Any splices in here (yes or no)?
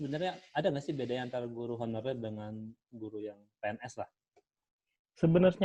no